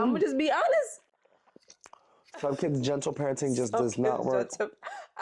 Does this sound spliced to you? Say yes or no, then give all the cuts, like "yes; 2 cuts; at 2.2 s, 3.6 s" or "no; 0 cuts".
no; 0 cuts